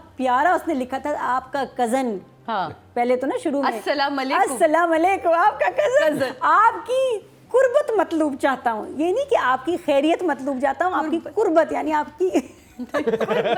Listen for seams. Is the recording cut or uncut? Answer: uncut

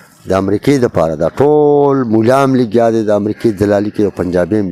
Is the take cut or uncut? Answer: uncut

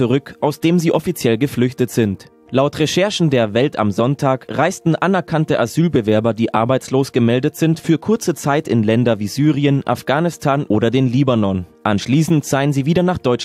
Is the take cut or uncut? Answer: cut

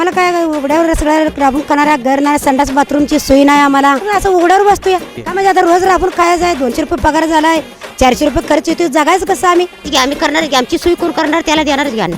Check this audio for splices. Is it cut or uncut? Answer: cut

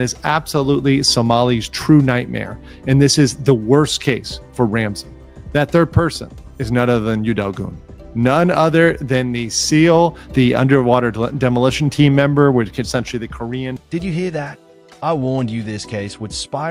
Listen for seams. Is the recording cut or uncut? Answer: uncut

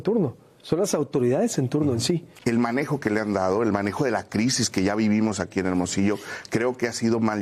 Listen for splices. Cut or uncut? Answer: cut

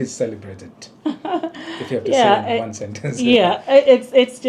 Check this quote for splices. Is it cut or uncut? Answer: uncut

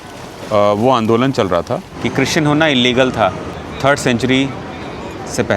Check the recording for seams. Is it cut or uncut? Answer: cut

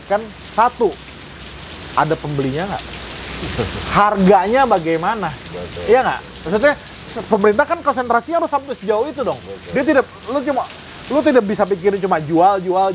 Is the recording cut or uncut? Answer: uncut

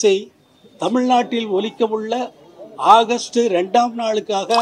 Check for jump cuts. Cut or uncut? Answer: uncut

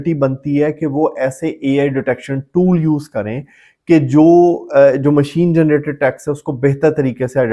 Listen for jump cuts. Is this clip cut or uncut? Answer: uncut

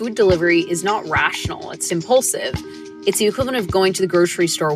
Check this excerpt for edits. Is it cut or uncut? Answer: cut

